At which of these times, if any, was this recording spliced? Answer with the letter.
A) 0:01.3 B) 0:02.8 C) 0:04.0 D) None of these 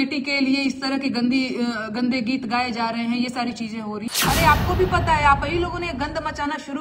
C